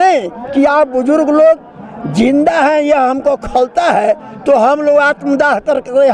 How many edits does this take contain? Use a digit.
0